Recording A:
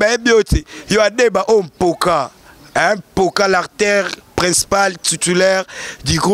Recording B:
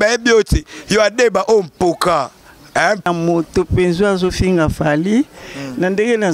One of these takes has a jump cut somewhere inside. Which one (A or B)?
B